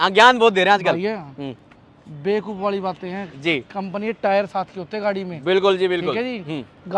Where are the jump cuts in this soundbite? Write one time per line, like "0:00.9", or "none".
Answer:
none